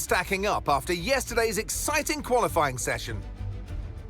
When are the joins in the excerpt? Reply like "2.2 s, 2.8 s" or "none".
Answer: 3.2 s

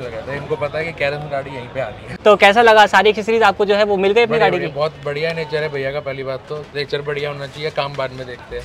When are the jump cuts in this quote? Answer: 2.0 s

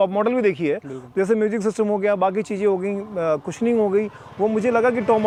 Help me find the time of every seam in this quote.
none

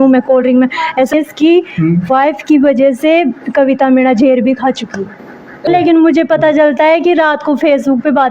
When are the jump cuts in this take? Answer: 1.1 s, 5.7 s

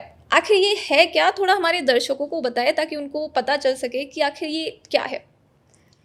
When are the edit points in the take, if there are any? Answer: none

